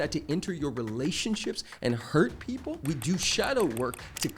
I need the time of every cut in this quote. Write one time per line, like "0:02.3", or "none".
0:02.8